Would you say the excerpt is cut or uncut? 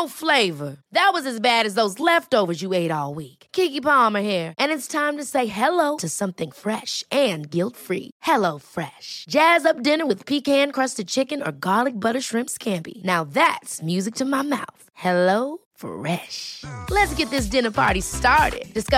uncut